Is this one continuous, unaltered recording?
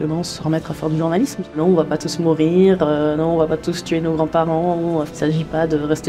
no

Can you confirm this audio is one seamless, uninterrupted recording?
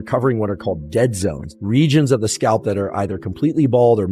no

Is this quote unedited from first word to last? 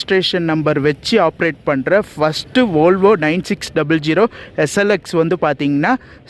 yes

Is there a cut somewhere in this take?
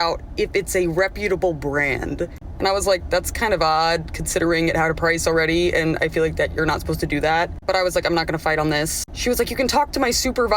no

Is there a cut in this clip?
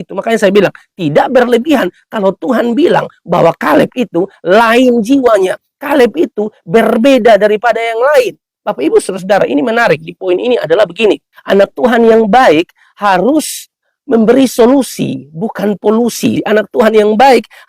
yes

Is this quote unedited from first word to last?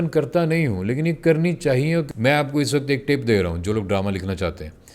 no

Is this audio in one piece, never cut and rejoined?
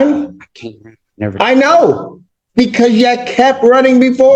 yes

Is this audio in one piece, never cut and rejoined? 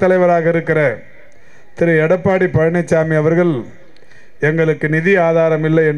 yes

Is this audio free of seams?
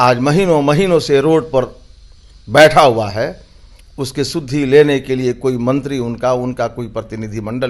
yes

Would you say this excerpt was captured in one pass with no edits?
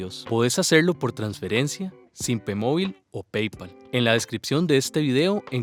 yes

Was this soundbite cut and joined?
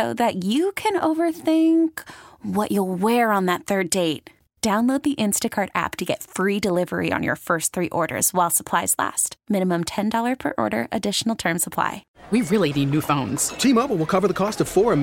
yes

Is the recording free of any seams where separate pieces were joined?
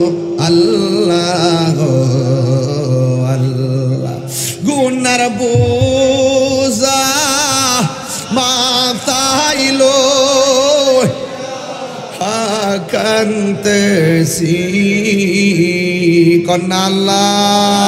yes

